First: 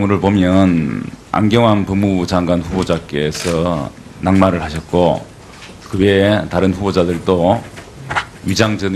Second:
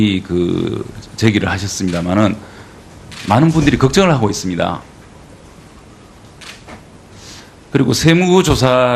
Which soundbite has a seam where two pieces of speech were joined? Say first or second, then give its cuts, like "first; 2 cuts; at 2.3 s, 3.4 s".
second; 1 cut; at 4.7 s